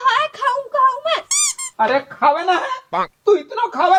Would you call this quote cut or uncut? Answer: uncut